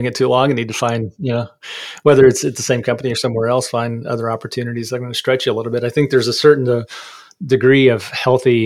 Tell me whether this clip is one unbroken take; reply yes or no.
yes